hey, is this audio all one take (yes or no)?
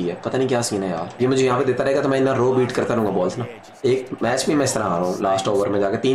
yes